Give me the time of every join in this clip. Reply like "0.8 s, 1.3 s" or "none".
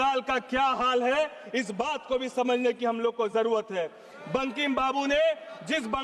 none